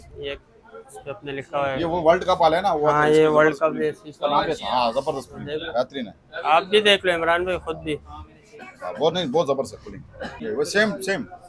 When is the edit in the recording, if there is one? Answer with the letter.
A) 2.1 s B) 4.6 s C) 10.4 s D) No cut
C